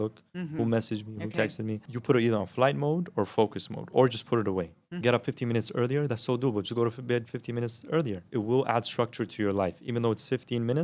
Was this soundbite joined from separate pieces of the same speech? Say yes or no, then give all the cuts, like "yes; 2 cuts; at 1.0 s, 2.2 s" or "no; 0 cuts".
yes; 3 cuts; at 1.9 s, 5.0 s, 8.3 s